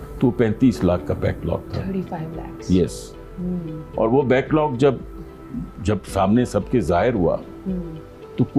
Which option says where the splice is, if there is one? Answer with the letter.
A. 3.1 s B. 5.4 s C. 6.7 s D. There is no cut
D